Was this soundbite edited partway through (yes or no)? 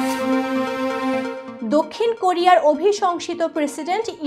yes